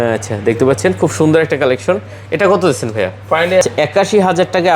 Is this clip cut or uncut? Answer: cut